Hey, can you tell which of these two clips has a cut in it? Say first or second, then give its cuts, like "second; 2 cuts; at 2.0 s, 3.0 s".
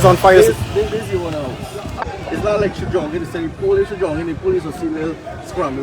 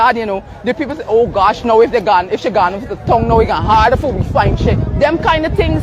first; 1 cut; at 2.0 s